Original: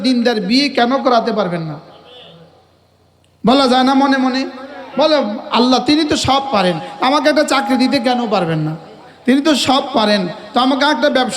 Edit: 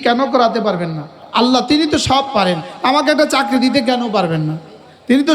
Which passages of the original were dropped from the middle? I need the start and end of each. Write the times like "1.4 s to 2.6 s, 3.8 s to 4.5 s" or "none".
1.9 s to 5.4 s